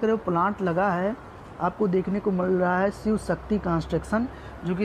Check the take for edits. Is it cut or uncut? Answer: uncut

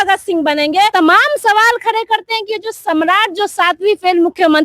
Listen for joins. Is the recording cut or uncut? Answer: cut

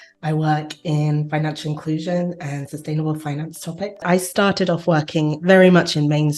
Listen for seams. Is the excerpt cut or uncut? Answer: cut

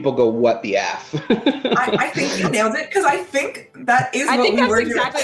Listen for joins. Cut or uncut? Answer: uncut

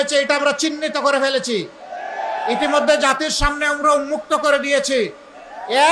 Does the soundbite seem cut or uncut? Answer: uncut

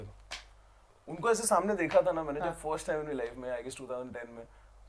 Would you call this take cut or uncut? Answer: uncut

